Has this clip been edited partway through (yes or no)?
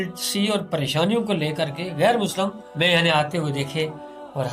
yes